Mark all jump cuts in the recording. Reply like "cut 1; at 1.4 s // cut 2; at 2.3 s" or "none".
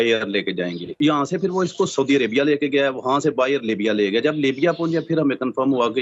cut 1; at 1.0 s